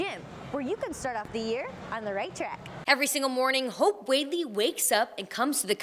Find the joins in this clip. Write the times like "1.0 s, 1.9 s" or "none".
2.7 s